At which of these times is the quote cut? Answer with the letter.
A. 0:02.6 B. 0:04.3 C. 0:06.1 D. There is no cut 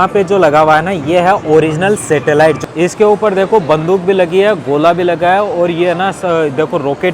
A